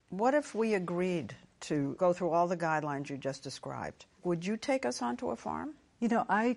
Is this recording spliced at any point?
yes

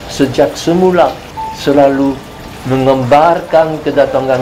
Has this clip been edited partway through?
yes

